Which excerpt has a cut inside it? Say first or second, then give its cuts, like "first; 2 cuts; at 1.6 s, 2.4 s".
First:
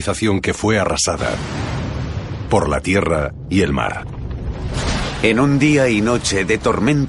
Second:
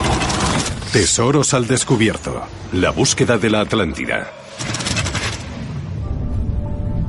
second; 1 cut; at 1.8 s